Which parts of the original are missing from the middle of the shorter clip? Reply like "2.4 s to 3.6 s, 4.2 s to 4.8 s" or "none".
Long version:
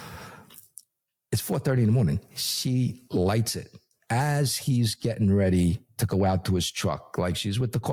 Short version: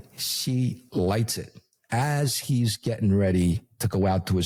none